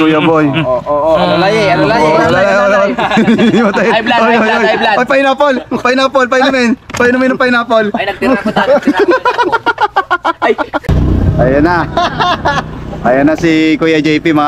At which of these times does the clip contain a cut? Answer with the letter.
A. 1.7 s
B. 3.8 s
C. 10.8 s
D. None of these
C